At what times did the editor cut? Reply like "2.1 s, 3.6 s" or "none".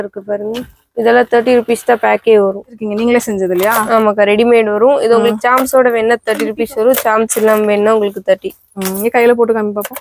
2.8 s